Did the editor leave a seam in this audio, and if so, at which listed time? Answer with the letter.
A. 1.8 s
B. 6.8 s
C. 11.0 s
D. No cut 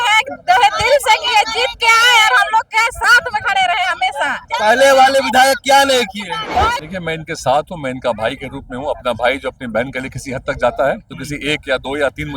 B